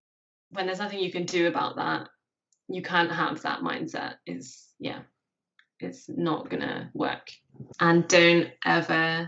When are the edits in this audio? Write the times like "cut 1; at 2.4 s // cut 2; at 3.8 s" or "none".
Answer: cut 1; at 7.7 s